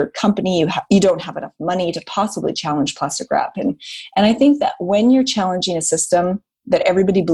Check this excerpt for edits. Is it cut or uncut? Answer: uncut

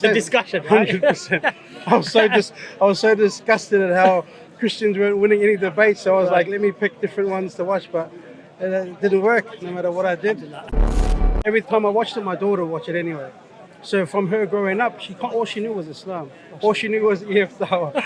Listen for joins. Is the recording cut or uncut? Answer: cut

